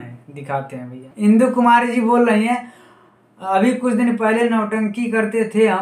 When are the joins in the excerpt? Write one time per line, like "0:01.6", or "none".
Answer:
0:01.2